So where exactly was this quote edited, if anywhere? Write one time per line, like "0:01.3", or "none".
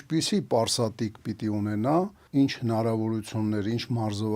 0:02.2